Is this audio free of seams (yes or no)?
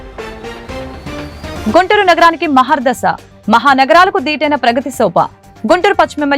no